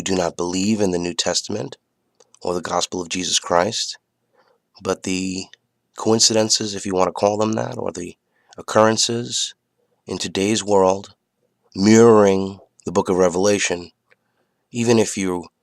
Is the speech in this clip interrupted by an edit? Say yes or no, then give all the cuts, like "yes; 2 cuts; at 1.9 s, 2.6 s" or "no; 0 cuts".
yes; 1 cut; at 8.5 s